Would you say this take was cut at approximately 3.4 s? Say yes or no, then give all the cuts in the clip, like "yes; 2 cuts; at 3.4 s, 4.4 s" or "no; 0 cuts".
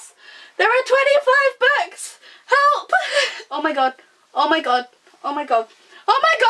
yes; 1 cut; at 3.4 s